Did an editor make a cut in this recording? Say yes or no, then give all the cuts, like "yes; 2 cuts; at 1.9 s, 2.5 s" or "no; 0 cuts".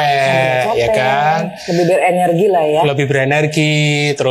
no; 0 cuts